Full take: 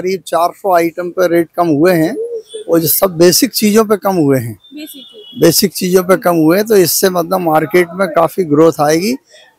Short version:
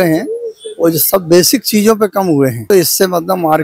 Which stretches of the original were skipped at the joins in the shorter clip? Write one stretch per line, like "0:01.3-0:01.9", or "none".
0:04.6-0:06.7